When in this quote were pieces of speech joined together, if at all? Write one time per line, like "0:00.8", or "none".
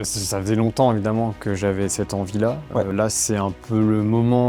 0:02.9